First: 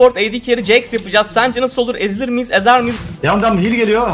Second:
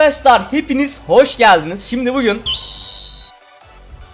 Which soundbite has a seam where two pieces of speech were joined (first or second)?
first